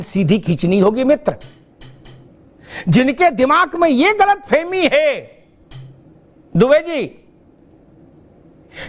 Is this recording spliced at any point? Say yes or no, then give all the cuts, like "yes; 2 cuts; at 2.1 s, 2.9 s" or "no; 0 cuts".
no; 0 cuts